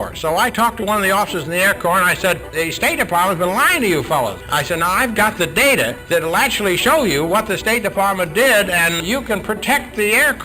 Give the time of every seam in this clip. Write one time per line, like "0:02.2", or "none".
0:02.5
0:04.4
0:06.0
0:09.0